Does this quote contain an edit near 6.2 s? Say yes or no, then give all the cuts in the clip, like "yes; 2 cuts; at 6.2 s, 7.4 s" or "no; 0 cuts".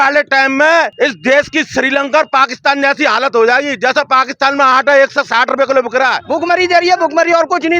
yes; 2 cuts; at 0.9 s, 6.2 s